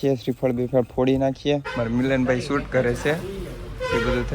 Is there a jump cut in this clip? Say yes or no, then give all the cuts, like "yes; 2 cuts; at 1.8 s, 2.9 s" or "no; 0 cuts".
yes; 1 cut; at 1.7 s